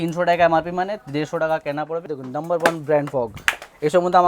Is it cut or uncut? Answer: cut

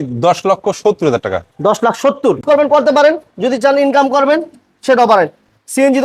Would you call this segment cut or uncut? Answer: cut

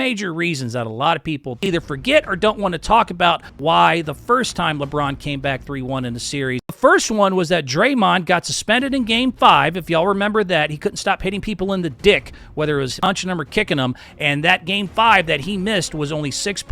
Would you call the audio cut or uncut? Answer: cut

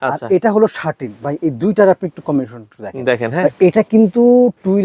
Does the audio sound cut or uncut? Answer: uncut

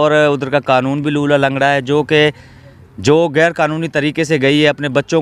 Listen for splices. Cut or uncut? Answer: uncut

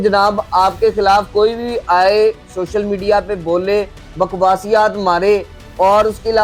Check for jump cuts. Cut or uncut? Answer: uncut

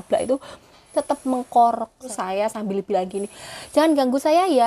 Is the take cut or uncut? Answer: cut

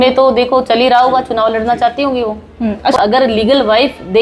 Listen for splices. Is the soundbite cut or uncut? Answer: cut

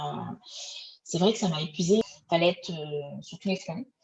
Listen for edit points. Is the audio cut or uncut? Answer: cut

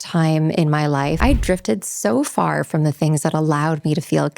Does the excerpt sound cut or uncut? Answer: cut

